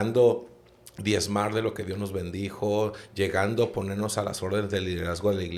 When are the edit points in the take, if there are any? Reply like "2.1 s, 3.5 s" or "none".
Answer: none